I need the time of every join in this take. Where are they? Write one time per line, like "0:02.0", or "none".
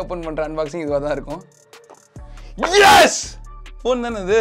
none